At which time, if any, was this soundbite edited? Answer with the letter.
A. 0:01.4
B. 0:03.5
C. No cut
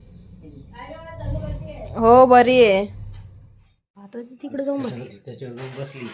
C